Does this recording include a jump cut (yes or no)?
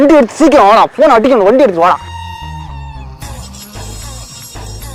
no